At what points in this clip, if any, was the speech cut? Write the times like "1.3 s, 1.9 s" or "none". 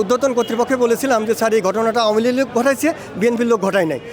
none